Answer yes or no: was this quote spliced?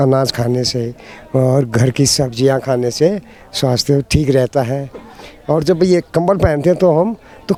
no